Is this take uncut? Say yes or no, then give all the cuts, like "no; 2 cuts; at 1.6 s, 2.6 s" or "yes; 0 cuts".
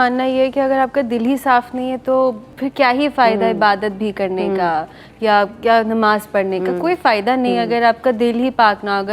yes; 0 cuts